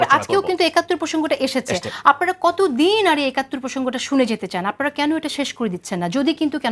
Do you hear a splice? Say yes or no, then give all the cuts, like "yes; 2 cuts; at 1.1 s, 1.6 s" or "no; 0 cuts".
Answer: no; 0 cuts